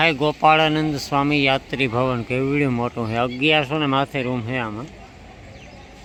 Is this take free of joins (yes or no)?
yes